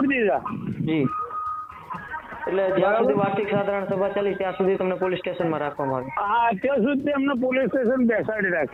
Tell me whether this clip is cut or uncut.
uncut